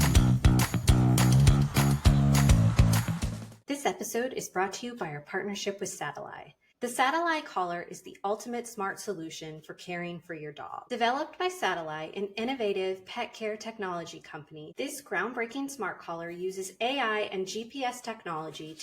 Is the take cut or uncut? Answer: cut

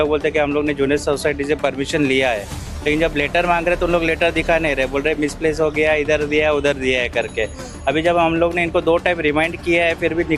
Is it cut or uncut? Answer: uncut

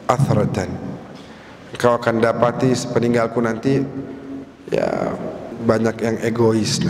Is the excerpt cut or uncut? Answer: cut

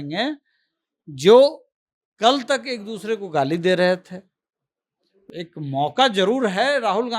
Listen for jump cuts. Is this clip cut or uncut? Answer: cut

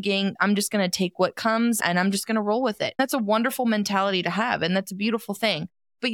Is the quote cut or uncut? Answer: cut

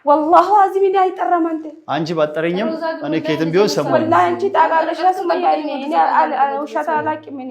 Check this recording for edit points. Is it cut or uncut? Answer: uncut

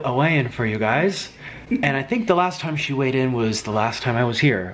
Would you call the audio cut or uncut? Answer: uncut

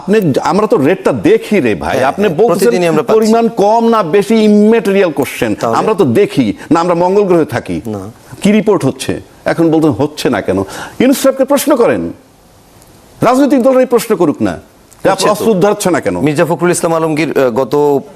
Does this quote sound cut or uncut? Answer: uncut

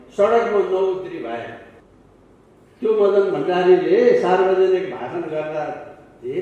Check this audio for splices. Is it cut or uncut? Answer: cut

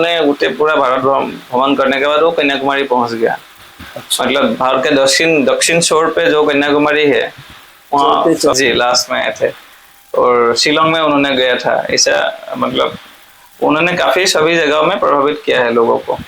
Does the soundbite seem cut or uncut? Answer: cut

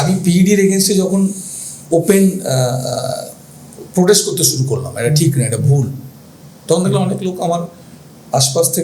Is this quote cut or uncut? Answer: uncut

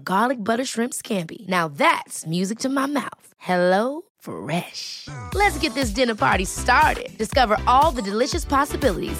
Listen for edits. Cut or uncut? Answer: uncut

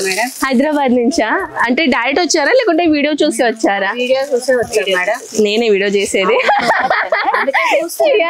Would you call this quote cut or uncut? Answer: uncut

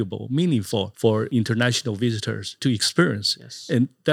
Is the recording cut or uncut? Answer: cut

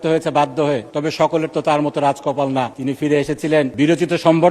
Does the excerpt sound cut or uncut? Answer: cut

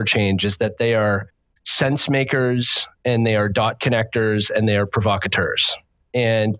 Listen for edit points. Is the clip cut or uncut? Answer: uncut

